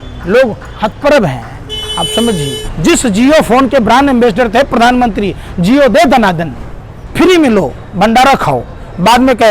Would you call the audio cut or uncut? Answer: cut